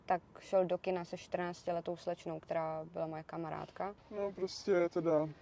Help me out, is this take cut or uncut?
cut